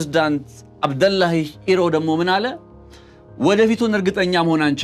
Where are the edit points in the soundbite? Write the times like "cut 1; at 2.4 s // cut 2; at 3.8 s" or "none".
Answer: none